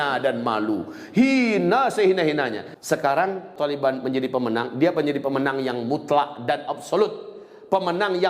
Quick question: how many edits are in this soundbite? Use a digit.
2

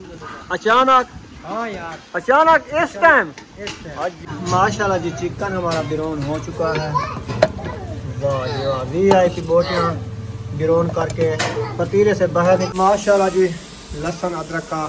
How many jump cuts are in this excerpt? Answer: 2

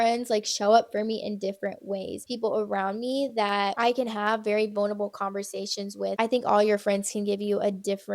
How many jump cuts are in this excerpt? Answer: 2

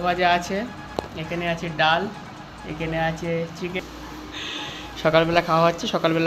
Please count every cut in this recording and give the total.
1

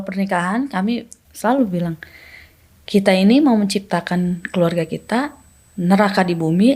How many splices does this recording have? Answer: 1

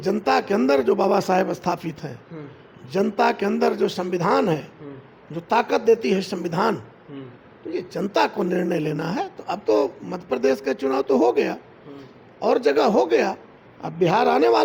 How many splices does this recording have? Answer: 0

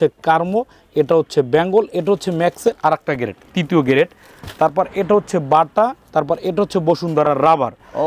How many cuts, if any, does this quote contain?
0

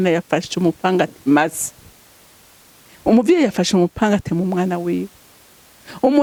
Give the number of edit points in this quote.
0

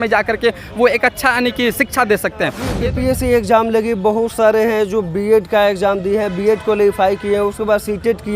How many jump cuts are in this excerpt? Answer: 1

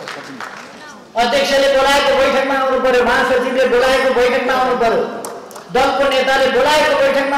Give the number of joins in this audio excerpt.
0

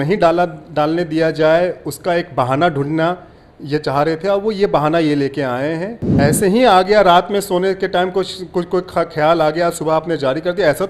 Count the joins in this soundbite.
1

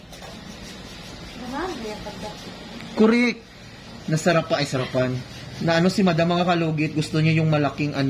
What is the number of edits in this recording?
0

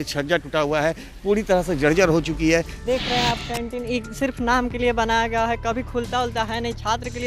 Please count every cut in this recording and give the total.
1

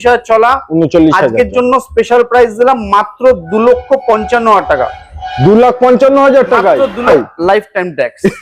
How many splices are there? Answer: 1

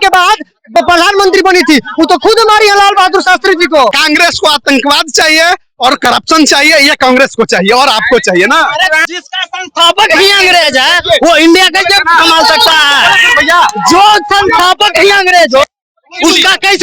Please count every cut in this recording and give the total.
2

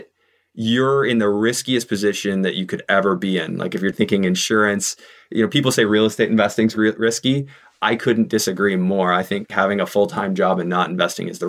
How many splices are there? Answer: 2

